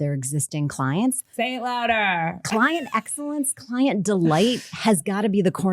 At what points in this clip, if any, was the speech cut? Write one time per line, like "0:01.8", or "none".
0:01.2